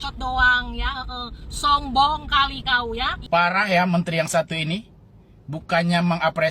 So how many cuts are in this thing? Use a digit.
1